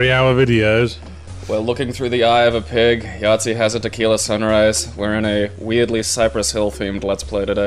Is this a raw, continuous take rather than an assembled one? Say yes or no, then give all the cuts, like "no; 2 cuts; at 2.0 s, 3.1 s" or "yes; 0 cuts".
yes; 0 cuts